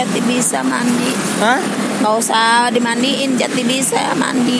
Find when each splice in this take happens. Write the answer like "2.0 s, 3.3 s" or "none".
none